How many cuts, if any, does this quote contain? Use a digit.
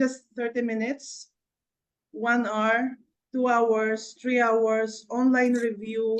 0